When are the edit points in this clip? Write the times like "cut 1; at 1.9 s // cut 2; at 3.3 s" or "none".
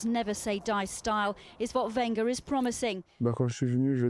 cut 1; at 3.1 s